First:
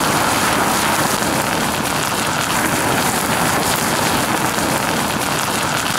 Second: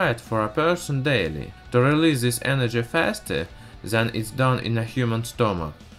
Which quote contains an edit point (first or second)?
first